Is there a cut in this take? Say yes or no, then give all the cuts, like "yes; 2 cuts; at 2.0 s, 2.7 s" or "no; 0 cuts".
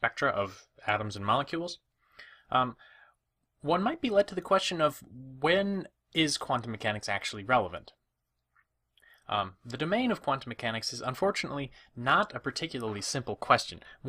yes; 1 cut; at 1.6 s